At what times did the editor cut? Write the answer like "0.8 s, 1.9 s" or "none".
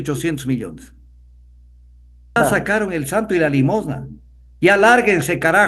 2.4 s